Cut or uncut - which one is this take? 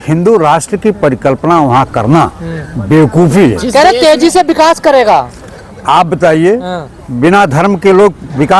uncut